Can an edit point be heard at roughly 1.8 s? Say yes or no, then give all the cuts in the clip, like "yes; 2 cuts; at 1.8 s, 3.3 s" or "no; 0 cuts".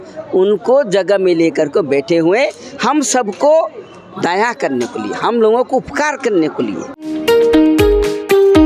no; 1 cut; at 7.0 s